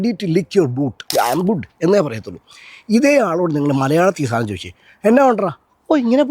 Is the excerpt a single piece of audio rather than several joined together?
no; 1 cut; at 1.0 s

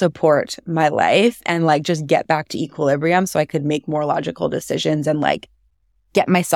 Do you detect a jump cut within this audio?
no; 0 cuts

